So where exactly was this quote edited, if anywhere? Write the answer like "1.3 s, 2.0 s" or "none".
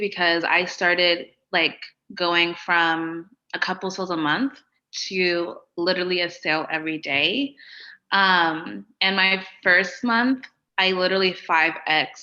none